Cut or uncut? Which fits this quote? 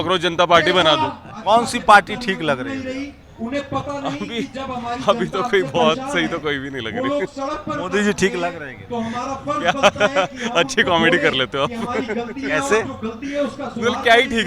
cut